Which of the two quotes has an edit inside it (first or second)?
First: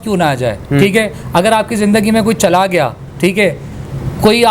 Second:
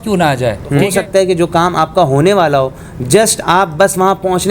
second